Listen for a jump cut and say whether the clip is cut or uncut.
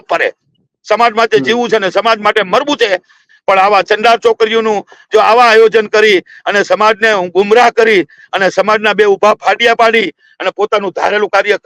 uncut